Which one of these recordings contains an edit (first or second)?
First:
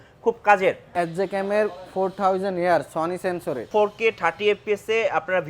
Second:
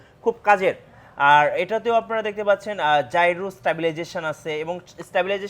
first